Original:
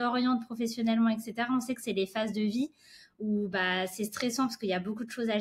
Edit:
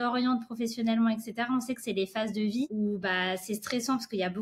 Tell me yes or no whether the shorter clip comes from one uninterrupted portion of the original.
no